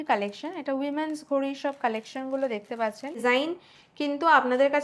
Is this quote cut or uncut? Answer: cut